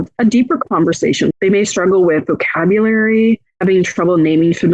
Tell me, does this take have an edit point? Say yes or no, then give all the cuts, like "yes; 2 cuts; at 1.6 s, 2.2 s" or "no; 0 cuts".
yes; 1 cut; at 1.3 s